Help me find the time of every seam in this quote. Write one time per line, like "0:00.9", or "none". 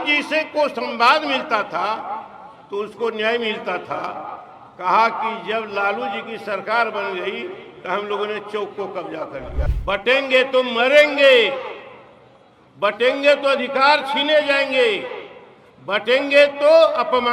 0:09.7